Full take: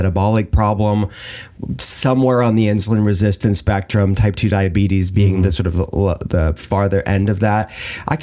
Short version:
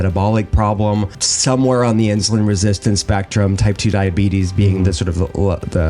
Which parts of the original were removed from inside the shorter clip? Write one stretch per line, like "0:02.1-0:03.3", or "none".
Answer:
0:01.2-0:01.8